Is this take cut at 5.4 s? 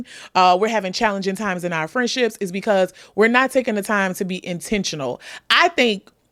no; 0 cuts

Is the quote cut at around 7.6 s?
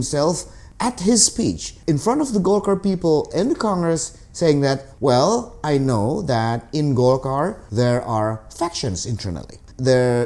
yes; 3 cuts; at 1.7 s, 4.9 s, 7.6 s

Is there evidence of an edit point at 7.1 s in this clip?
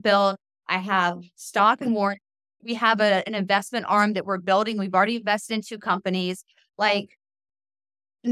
no; 0 cuts

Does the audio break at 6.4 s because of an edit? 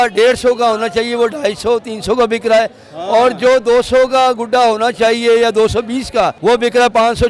yes; 1 cut; at 6.4 s

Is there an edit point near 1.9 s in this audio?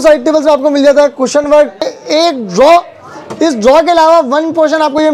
yes; 1 cut; at 1.9 s

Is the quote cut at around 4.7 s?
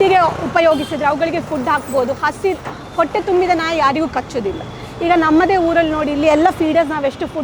no; 0 cuts

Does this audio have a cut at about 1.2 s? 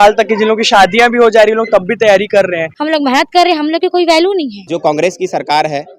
no; 2 cuts; at 2.7 s, 4.6 s

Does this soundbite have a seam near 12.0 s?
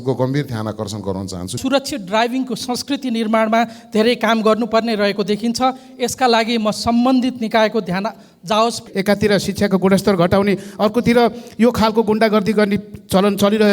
no; 2 cuts; at 1.6 s, 8.8 s

